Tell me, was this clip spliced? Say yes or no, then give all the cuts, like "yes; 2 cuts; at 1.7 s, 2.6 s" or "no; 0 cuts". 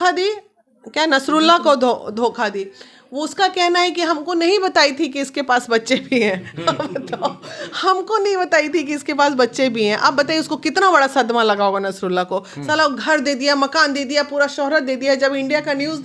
no; 0 cuts